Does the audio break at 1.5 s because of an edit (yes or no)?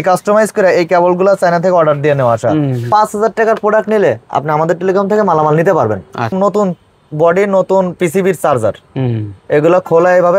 no